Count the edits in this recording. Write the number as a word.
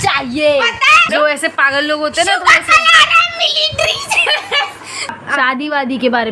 two